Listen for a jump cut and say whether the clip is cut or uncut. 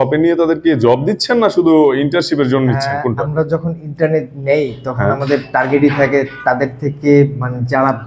uncut